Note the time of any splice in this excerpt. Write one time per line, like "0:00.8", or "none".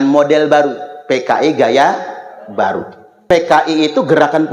0:03.1